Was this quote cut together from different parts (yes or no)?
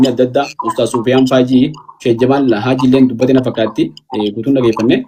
no